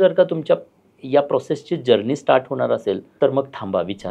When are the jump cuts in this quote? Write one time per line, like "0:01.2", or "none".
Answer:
0:03.1